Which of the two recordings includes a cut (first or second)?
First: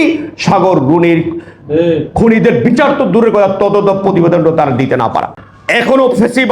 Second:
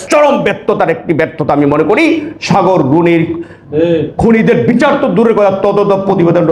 first